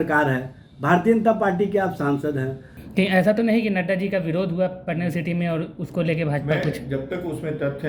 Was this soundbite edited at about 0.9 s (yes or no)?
no